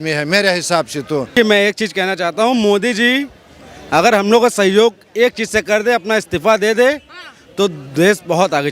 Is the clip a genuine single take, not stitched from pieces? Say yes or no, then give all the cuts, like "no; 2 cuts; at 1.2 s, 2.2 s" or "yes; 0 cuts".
no; 1 cut; at 1.3 s